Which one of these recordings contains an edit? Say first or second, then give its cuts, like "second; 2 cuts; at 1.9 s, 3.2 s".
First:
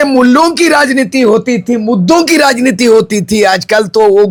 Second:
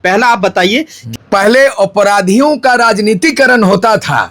second; 1 cut; at 1.0 s